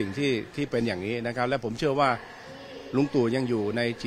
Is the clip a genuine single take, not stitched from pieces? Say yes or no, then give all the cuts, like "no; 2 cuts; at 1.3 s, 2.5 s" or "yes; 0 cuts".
yes; 0 cuts